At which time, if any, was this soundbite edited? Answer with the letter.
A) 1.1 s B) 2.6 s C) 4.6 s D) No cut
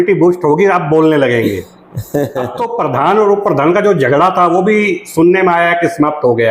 B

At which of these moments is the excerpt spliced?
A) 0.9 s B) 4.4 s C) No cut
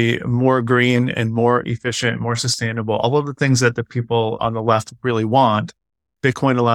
B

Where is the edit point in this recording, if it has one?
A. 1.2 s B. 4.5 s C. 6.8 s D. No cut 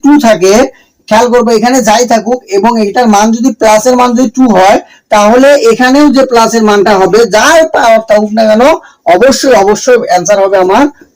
D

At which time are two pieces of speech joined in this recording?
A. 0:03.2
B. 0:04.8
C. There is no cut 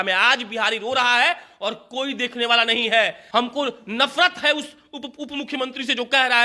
A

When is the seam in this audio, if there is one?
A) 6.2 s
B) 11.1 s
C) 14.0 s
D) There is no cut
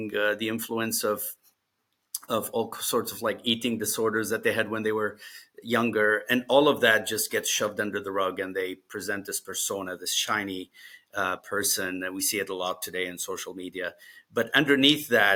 D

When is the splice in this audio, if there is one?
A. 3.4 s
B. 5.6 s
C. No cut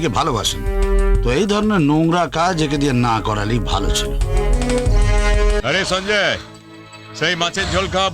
B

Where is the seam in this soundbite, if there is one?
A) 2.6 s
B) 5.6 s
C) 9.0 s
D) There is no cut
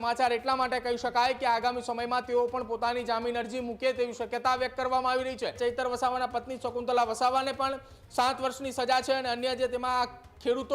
B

